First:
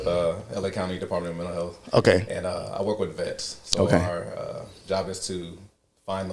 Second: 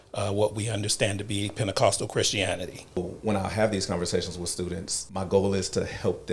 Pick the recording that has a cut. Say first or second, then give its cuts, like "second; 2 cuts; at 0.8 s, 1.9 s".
second; 2 cuts; at 3.0 s, 5.0 s